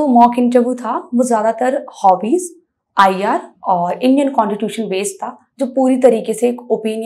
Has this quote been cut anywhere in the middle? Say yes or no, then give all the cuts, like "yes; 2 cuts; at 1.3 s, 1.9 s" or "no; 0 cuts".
no; 0 cuts